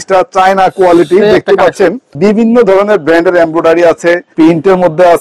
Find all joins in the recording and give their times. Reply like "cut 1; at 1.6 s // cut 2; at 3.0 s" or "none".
cut 1; at 2.1 s // cut 2; at 4.3 s